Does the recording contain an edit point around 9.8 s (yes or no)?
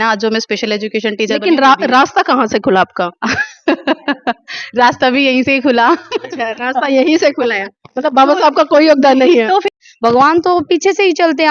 yes